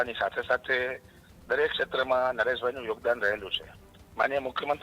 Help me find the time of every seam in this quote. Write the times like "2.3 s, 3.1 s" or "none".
none